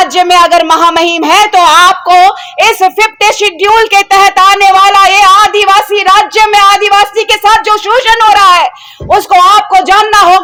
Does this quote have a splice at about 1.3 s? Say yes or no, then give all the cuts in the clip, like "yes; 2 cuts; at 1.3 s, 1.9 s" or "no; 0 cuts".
no; 0 cuts